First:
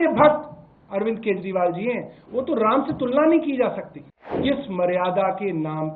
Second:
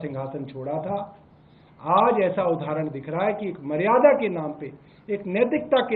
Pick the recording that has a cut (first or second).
first